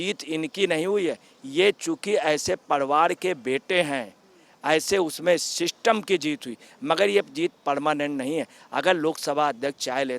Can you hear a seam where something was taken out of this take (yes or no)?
no